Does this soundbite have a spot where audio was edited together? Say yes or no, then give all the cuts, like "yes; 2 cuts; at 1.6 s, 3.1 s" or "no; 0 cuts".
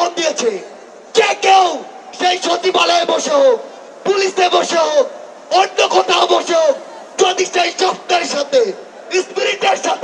no; 0 cuts